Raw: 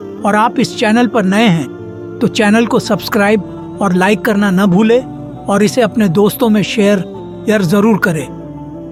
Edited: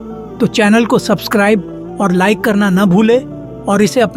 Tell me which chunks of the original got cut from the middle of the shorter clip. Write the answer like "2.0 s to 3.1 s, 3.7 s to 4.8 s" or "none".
none